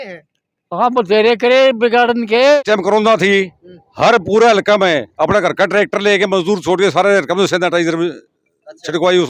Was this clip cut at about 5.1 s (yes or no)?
no